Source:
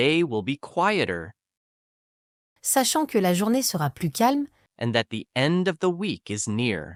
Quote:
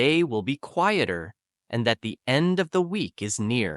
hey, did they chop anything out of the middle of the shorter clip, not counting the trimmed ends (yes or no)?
yes